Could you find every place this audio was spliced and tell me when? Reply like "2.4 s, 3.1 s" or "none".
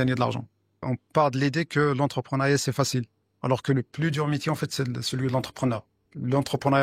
0.9 s

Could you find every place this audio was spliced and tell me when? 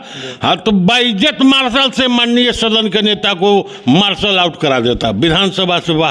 none

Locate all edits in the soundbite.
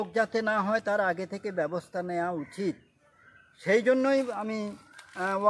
none

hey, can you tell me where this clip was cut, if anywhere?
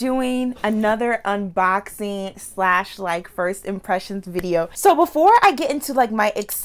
4.7 s

